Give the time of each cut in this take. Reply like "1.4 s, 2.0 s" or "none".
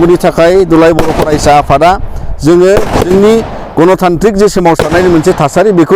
none